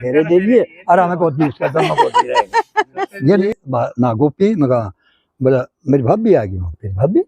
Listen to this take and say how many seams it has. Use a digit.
1